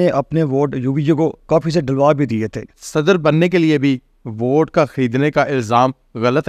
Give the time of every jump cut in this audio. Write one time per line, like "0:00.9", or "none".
0:02.7